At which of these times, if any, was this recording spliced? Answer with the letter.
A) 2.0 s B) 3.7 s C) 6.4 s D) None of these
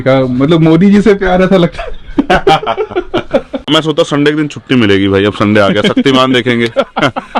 B